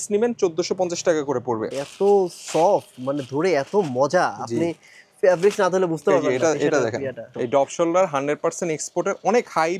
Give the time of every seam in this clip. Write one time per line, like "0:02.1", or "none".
0:01.7
0:07.3